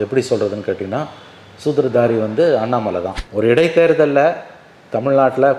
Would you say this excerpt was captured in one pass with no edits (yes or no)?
no